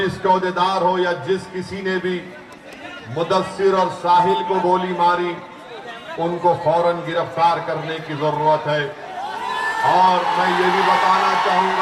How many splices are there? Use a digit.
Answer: 0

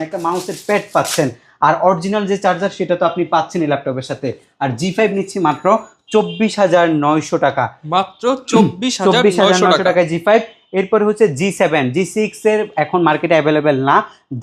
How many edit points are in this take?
0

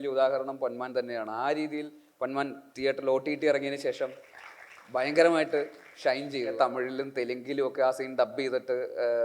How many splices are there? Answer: 1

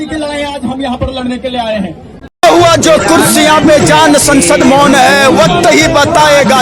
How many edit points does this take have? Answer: 1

